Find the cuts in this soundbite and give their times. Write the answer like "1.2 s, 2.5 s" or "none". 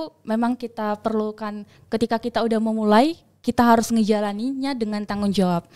none

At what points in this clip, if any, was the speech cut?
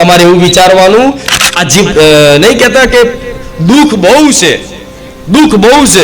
1.3 s

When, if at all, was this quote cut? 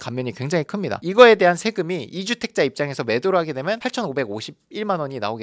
0.9 s

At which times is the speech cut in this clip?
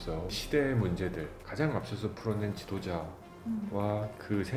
1.5 s

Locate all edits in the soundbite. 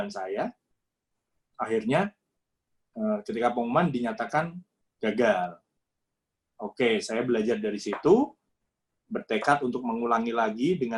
none

